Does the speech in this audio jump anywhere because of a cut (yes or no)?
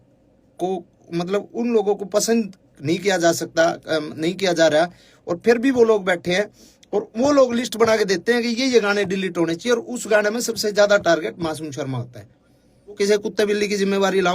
yes